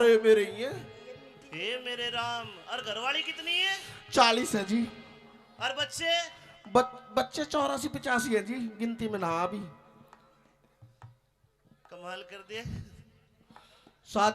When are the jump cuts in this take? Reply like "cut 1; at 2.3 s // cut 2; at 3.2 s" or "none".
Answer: none